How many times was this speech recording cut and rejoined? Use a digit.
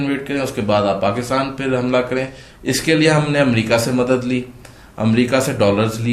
1